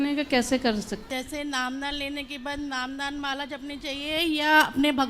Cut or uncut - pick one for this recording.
cut